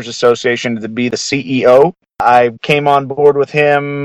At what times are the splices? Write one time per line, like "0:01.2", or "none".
0:01.1
0:02.4